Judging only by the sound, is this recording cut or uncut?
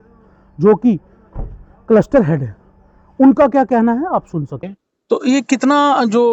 cut